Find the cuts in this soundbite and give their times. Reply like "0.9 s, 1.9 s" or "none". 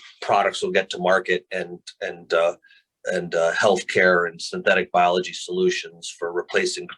none